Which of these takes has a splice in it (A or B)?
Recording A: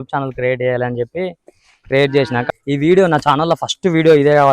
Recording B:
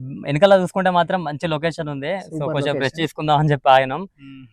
A